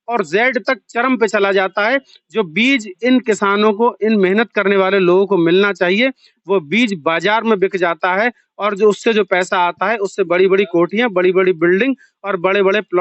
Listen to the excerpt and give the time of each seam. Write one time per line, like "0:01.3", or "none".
none